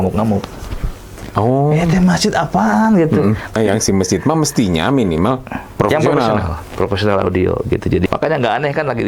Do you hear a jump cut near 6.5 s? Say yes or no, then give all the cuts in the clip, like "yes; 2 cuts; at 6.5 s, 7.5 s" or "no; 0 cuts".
no; 2 cuts; at 3.6 s, 8.1 s